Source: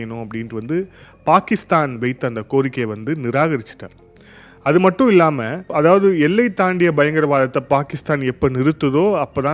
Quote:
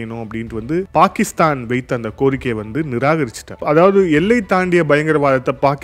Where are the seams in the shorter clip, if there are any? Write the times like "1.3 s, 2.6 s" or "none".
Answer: 0.9 s, 3.5 s